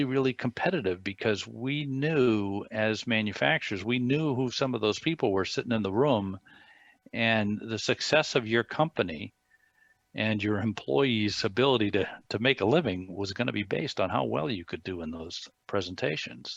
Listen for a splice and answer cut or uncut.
uncut